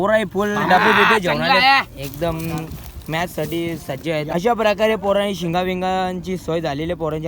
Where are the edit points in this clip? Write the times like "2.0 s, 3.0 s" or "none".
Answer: 4.3 s